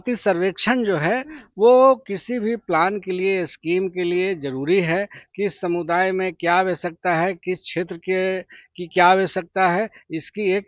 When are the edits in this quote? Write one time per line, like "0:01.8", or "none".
none